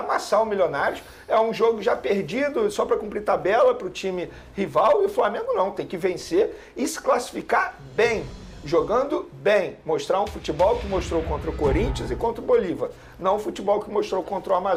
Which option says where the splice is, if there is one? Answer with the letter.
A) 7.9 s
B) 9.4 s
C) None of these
C